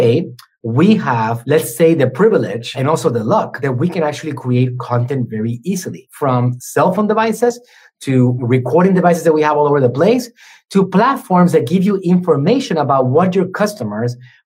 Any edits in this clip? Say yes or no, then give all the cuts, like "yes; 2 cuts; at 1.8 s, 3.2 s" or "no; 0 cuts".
yes; 5 cuts; at 1.4 s, 2.8 s, 3.5 s, 6.3 s, 8.3 s